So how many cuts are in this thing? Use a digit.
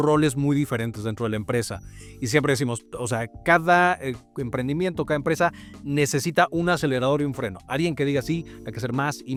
0